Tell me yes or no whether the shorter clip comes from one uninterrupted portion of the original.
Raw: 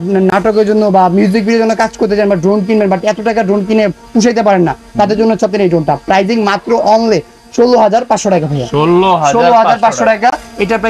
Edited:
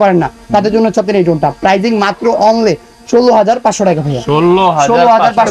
yes